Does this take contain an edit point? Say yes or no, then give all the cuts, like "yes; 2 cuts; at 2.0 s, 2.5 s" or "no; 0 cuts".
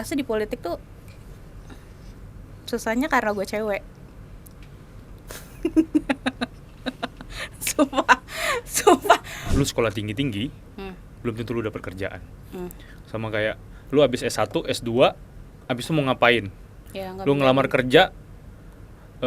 yes; 1 cut; at 9.4 s